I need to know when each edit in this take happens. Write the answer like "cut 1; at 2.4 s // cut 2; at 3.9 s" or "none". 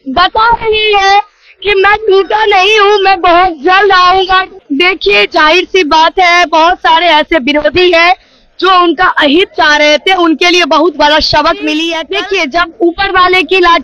cut 1; at 4.5 s // cut 2; at 12.0 s